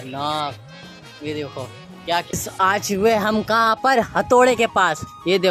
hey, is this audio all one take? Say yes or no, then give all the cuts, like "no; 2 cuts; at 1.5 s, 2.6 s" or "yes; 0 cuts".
no; 1 cut; at 2.3 s